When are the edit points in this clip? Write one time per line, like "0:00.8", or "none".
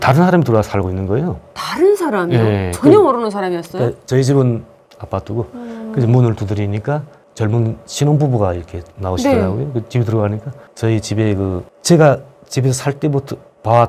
none